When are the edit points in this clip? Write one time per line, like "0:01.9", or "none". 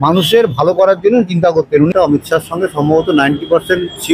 0:01.9